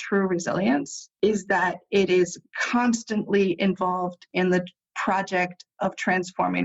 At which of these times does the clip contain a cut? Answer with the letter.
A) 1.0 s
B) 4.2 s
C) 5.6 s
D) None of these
A